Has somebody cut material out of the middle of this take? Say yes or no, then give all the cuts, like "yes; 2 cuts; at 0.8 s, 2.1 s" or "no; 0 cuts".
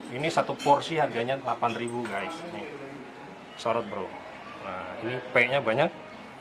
no; 0 cuts